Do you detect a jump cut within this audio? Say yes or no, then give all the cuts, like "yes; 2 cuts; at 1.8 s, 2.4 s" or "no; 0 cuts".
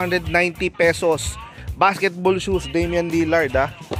no; 0 cuts